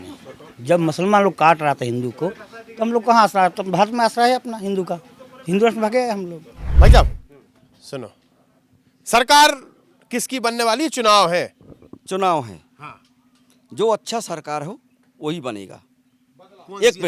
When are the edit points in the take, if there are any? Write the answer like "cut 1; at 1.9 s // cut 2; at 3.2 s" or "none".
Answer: none